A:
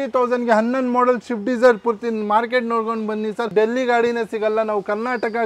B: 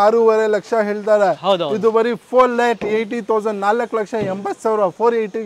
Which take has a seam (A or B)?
A